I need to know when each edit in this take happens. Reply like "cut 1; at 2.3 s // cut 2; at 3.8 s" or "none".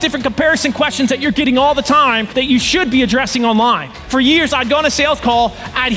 cut 1; at 2.2 s // cut 2; at 3.9 s